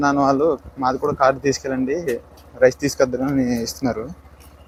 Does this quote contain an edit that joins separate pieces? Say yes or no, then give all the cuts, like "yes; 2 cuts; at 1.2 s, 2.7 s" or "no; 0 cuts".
no; 0 cuts